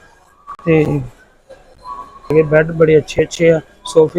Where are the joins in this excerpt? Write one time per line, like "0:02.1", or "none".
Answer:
0:02.3